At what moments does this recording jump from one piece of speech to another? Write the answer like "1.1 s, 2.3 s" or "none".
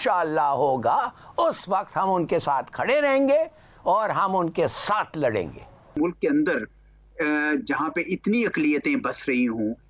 5.9 s